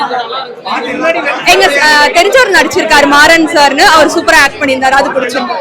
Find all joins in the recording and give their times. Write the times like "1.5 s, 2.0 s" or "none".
none

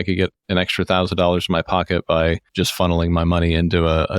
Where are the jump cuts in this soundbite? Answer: 2.5 s

